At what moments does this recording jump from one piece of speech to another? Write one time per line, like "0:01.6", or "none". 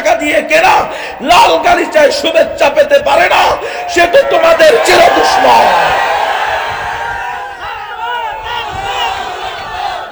none